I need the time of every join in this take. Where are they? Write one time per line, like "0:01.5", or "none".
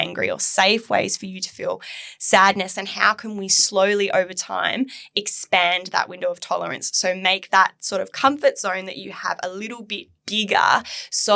none